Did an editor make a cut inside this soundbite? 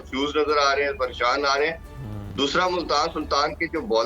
no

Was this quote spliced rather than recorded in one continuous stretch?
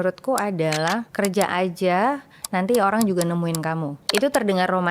yes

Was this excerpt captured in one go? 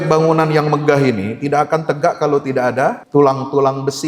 no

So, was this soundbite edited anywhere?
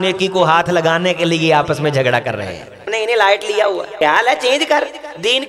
yes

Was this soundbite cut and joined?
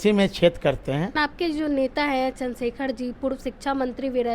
yes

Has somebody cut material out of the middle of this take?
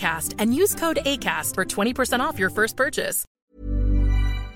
yes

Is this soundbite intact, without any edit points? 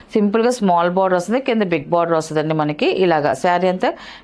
yes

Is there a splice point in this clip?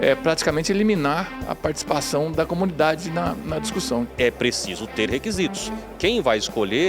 yes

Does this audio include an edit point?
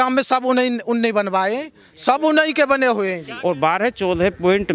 yes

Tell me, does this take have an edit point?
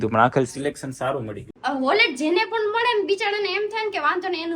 yes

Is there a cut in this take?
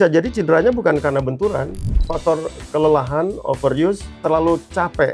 yes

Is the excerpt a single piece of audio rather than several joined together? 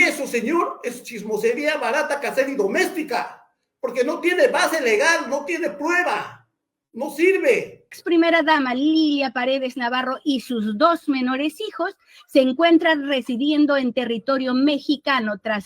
no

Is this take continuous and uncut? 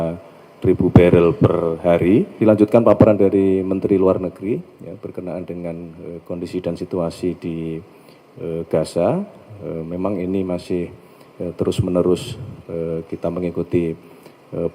no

